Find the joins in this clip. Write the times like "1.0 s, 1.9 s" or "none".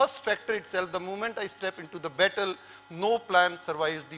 none

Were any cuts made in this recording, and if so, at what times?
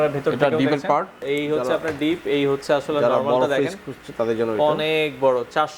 1.2 s

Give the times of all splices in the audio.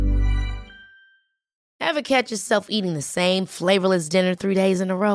1.6 s

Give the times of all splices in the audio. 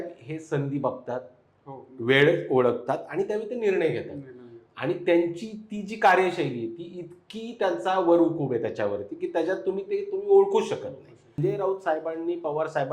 11.4 s

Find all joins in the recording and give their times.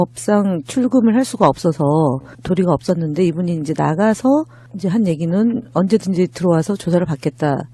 1.1 s

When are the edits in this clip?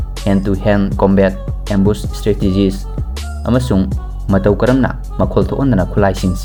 none

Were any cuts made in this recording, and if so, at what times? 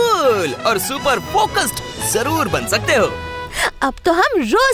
none

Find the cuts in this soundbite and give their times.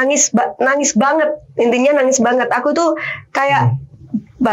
none

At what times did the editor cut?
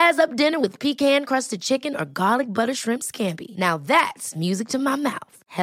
none

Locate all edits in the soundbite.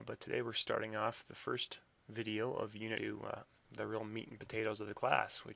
none

